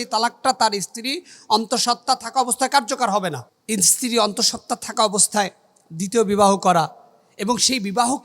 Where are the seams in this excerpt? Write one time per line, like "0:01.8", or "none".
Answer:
0:03.5